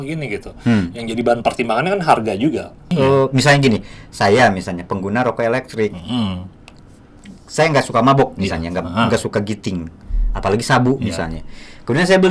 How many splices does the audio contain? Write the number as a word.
one